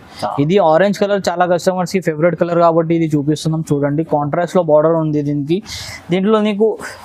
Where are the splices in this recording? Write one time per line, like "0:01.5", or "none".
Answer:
none